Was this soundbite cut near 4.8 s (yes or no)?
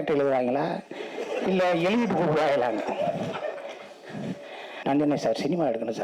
yes